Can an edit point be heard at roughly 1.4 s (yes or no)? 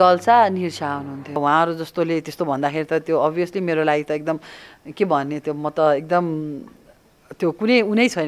yes